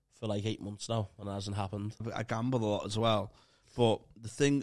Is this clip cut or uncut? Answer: cut